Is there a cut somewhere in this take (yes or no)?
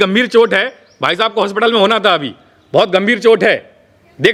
no